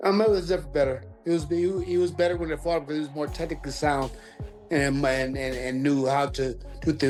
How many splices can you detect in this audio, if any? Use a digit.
0